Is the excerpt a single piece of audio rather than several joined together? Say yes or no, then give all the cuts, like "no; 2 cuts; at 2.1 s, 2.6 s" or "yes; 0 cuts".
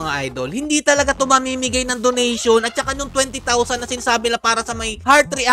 yes; 0 cuts